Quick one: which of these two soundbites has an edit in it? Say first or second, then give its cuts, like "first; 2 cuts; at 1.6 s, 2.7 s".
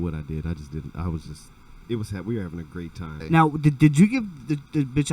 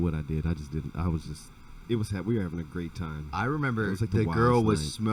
first; 1 cut; at 3.2 s